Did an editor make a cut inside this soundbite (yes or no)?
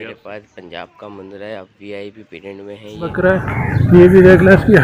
yes